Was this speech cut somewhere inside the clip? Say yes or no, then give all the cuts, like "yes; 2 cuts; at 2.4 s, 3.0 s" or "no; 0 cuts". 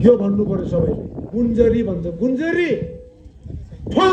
yes; 1 cut; at 1.1 s